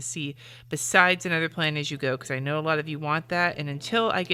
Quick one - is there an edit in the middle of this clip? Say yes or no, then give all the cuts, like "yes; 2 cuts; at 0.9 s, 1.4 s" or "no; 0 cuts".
no; 0 cuts